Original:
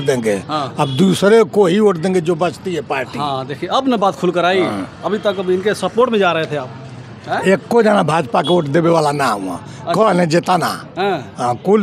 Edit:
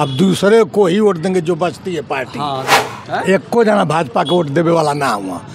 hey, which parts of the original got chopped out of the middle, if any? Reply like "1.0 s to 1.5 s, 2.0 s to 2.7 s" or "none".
3.5 s to 6.9 s